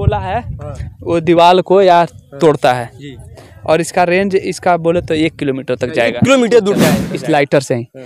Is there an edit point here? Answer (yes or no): yes